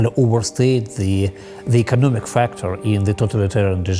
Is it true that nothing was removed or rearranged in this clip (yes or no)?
yes